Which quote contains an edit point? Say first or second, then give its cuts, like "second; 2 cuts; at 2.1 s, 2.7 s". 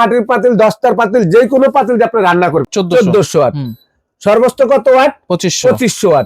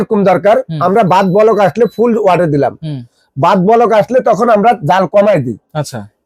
first; 1 cut; at 2.7 s